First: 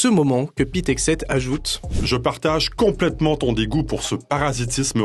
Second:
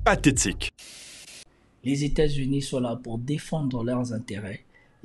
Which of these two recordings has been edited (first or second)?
second